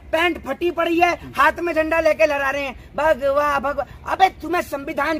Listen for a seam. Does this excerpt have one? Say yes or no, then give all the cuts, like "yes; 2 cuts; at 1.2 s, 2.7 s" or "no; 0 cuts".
no; 0 cuts